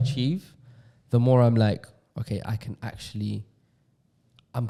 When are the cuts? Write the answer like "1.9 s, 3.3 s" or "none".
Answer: none